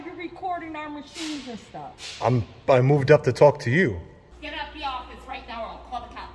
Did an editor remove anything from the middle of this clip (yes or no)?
yes